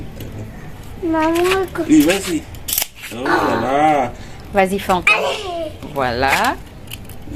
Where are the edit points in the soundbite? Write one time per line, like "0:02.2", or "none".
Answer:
none